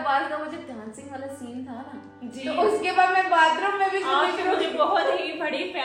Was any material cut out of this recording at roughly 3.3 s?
no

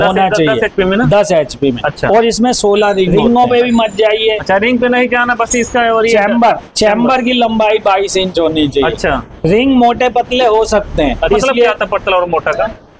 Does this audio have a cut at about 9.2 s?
no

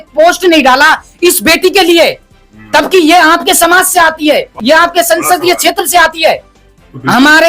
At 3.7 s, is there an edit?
no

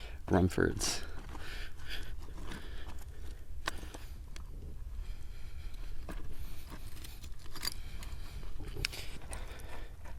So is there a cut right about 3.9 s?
no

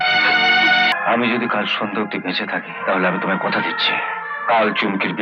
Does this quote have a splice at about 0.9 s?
yes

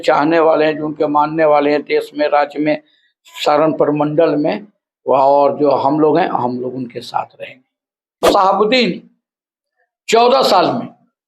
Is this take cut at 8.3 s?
yes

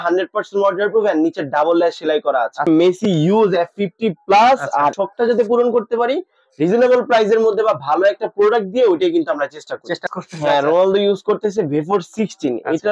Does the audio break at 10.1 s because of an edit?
yes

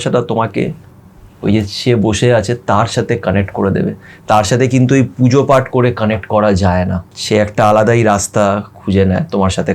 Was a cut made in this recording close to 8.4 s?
no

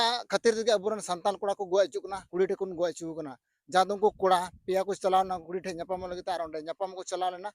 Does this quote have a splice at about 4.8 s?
no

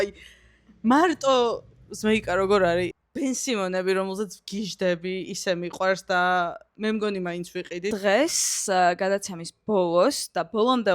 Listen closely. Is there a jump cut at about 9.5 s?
no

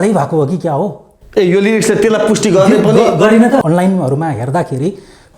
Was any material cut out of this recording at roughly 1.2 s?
no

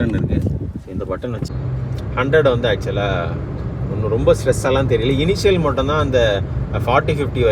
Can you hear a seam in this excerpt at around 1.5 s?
yes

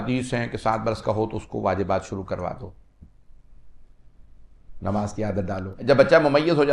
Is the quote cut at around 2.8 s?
no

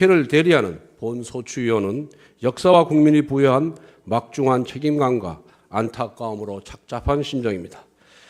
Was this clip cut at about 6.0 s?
yes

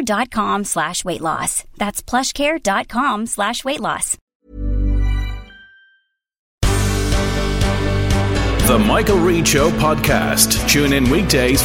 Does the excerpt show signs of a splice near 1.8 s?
no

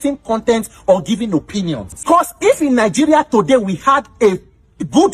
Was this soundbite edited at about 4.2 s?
no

